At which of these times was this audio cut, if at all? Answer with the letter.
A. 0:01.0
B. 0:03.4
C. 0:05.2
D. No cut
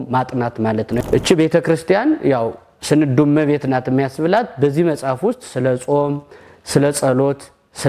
A